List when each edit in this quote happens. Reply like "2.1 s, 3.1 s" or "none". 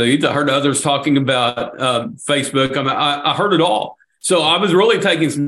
none